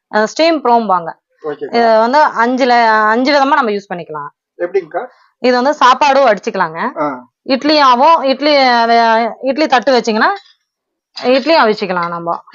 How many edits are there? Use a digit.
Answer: 0